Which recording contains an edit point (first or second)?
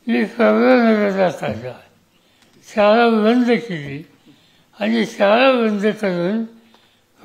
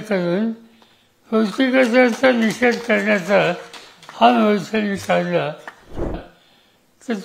second